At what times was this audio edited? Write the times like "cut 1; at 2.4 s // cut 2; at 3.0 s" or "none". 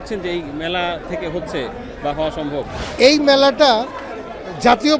cut 1; at 1.0 s // cut 2; at 2.8 s